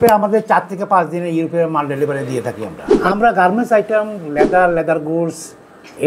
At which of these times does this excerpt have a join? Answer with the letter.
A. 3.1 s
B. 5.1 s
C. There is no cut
A